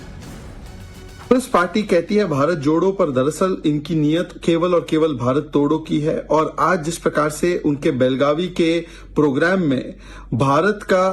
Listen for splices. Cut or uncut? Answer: cut